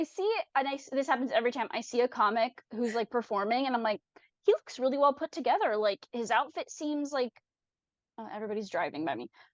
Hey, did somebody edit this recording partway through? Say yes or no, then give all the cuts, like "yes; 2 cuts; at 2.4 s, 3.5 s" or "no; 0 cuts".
no; 0 cuts